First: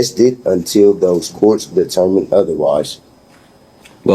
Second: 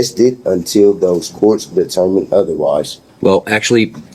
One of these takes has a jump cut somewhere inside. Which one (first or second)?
second